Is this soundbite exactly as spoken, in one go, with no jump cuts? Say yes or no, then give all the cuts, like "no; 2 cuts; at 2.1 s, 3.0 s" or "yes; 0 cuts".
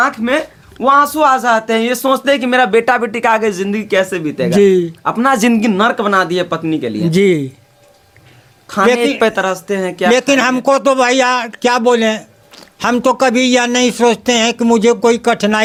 yes; 0 cuts